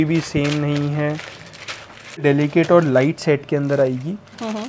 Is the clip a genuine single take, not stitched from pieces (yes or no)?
no